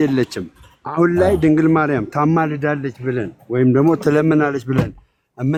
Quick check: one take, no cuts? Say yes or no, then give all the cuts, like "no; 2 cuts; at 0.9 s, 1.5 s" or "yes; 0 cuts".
yes; 0 cuts